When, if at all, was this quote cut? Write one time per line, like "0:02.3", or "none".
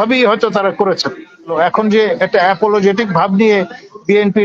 0:01.5